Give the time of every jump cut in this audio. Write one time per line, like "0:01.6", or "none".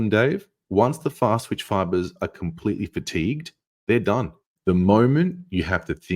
0:04.4